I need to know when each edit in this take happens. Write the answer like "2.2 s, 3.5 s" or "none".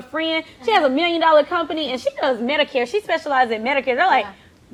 none